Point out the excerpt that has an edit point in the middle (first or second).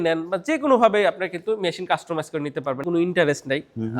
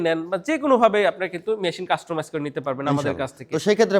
first